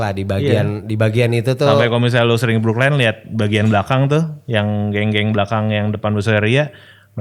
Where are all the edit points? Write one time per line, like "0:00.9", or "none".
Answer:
none